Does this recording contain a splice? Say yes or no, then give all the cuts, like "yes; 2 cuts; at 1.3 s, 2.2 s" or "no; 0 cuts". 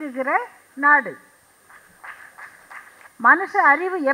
yes; 1 cut; at 3.0 s